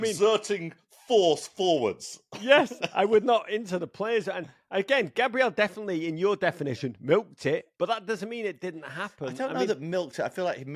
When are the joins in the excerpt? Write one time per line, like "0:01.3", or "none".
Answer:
0:07.7